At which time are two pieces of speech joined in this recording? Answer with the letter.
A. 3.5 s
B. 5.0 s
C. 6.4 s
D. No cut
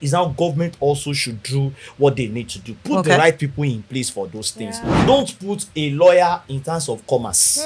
B